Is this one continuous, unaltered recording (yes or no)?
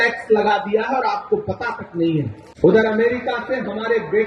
no